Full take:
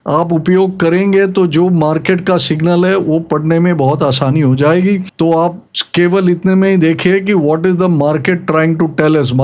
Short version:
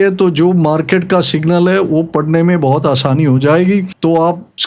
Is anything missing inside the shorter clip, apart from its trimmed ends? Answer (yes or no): no